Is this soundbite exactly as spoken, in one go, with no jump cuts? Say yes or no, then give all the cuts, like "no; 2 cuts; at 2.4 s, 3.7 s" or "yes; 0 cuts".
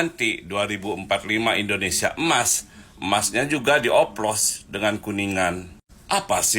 yes; 0 cuts